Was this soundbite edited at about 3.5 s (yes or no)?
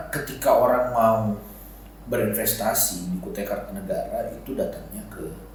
no